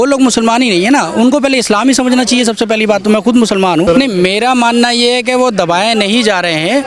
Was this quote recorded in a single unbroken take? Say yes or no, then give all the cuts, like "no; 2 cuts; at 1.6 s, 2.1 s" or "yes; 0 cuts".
no; 1 cut; at 3.8 s